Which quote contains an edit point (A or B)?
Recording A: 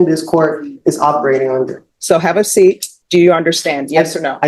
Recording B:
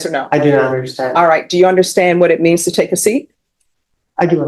A